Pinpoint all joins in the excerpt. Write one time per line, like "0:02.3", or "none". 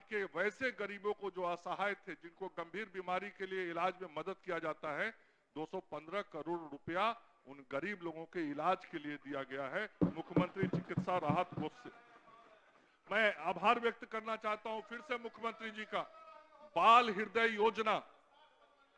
none